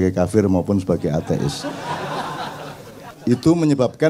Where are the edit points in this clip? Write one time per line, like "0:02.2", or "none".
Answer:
0:03.1